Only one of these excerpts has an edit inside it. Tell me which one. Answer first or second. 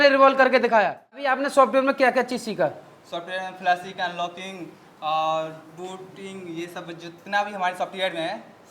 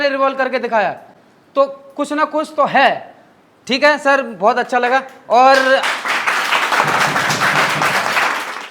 first